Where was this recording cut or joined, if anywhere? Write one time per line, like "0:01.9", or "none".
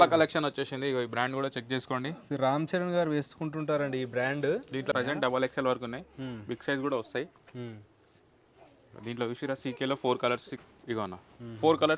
0:05.0
0:10.6